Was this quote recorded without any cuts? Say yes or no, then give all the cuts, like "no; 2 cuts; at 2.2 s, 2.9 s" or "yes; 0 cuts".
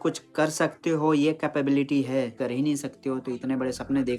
no; 1 cut; at 2.4 s